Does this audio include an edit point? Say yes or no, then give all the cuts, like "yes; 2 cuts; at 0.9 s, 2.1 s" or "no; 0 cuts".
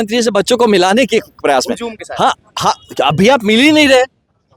no; 0 cuts